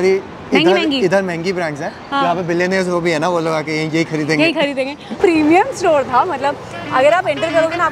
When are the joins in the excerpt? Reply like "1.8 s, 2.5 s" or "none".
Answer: 5.2 s